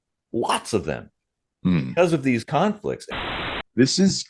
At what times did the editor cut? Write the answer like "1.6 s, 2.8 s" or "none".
3.0 s